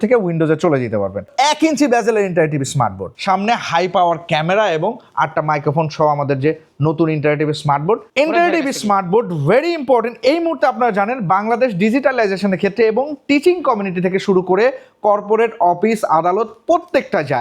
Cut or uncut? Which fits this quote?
cut